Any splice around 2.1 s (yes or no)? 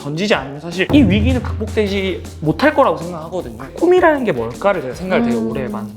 no